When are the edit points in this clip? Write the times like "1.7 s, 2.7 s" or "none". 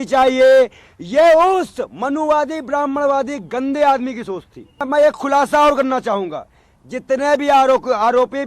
4.8 s